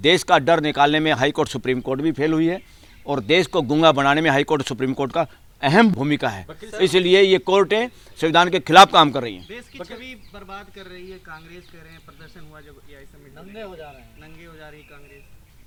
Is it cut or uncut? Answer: uncut